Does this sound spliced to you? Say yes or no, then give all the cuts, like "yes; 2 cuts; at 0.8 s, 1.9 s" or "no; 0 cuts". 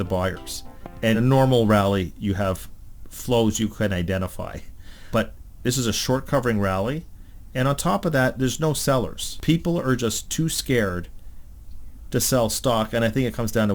yes; 3 cuts; at 1.1 s, 5.0 s, 9.3 s